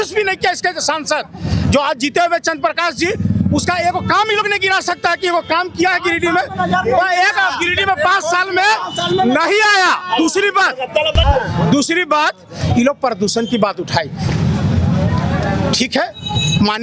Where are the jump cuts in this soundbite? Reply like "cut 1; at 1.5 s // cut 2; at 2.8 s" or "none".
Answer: cut 1; at 11.2 s